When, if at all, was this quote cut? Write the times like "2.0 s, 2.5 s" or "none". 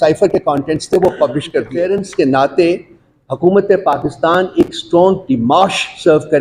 1.7 s